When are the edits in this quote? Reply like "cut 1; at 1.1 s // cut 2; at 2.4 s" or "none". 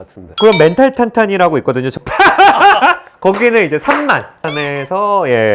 cut 1; at 4.5 s